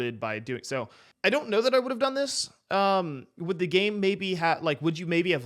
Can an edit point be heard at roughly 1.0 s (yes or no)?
yes